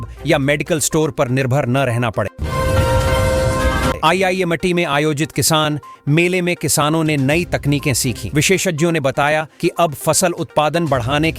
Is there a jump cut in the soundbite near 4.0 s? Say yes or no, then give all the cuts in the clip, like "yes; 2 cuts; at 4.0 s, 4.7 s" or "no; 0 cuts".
yes; 2 cuts; at 2.4 s, 4.0 s